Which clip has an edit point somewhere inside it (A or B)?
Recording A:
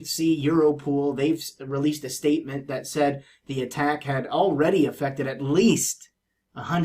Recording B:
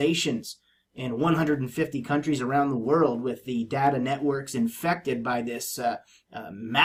A